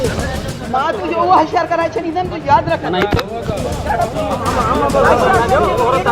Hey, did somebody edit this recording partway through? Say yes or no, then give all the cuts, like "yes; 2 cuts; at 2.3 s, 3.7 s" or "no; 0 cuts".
no; 0 cuts